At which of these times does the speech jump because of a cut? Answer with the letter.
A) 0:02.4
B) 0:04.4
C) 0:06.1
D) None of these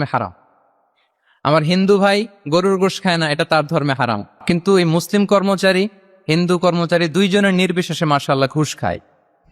B